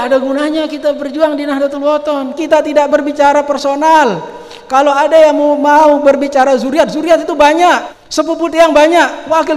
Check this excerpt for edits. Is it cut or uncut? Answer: cut